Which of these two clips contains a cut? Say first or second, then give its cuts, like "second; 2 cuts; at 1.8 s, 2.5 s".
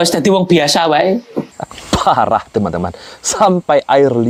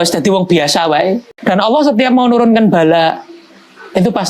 second; 1 cut; at 1.3 s